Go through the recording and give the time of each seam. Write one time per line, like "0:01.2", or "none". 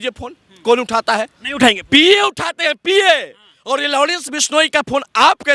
none